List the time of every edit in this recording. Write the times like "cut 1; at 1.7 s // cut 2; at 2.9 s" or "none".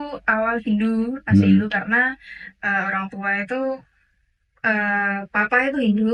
none